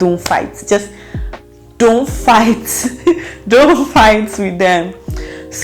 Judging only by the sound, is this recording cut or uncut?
uncut